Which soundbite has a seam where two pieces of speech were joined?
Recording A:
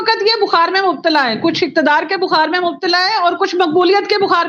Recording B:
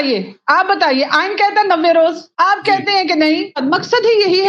B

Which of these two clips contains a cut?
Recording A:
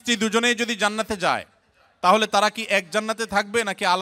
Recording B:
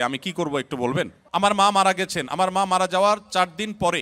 B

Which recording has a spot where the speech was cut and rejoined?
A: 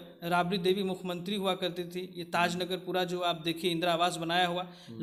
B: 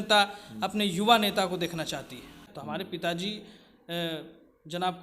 B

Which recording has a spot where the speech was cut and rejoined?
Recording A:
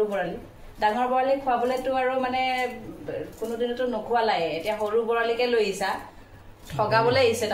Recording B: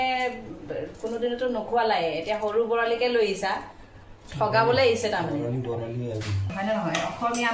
B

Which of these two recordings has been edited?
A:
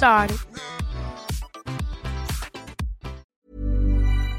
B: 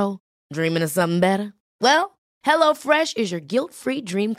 A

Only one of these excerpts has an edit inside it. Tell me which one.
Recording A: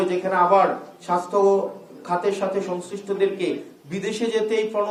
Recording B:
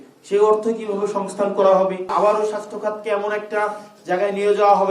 B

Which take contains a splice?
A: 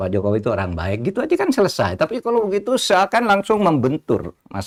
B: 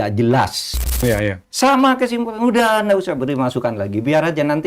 B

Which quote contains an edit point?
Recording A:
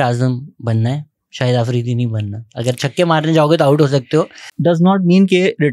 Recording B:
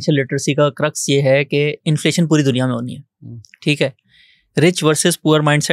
A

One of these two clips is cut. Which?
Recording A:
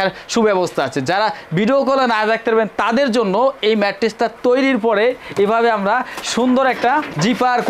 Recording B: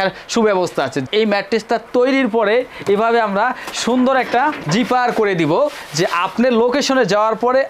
B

